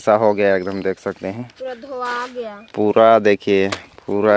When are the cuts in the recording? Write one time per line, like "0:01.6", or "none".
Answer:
none